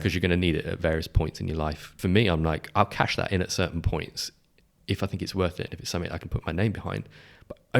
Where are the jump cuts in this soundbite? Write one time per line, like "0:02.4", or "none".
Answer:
0:01.9